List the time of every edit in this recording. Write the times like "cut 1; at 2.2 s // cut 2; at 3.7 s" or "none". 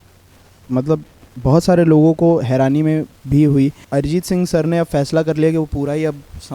cut 1; at 3.8 s

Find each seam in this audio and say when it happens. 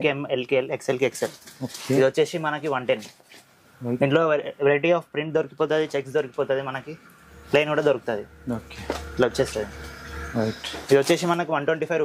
none

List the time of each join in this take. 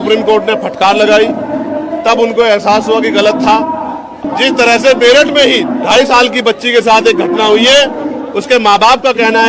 cut 1; at 4.1 s

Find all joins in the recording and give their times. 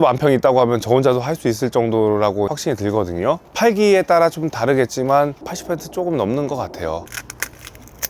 cut 1; at 7.1 s

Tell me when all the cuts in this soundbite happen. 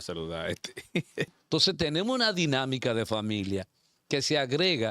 cut 1; at 1.3 s

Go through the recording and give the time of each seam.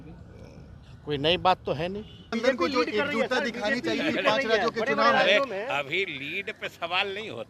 cut 1; at 2.3 s

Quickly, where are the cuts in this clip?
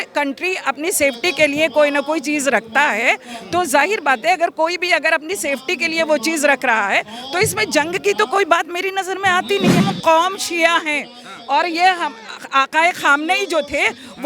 cut 1; at 9.8 s

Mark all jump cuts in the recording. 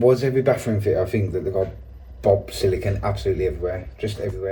none

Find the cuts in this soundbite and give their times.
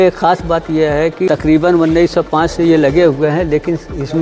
cut 1; at 1.3 s

